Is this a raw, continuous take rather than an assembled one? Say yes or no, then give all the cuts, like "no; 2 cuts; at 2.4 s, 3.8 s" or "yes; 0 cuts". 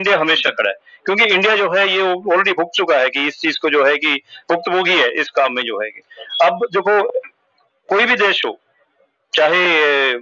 yes; 0 cuts